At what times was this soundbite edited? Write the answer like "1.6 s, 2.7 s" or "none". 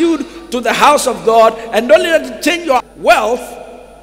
2.9 s